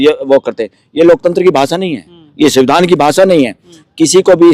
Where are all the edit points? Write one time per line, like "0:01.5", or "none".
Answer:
none